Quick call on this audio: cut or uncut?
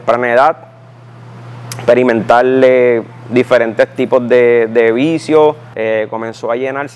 cut